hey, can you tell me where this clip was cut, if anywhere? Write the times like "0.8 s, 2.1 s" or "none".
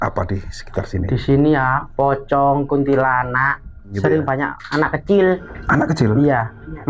3.9 s, 5.5 s